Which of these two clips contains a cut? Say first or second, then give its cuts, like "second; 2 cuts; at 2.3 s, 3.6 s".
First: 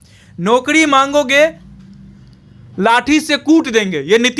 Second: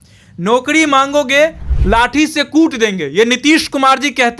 second; 1 cut; at 1.7 s